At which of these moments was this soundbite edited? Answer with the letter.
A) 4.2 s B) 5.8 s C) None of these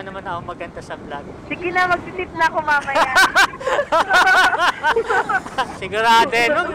B